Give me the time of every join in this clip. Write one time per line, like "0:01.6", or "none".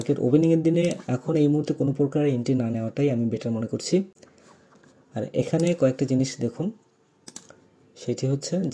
none